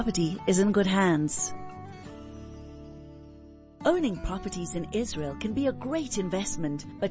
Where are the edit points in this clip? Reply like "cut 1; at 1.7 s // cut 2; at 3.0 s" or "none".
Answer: cut 1; at 1.3 s // cut 2; at 3.7 s